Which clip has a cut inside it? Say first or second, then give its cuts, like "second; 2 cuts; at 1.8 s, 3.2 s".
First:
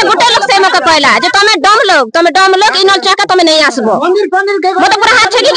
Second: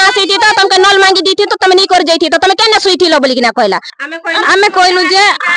second; 1 cut; at 3.9 s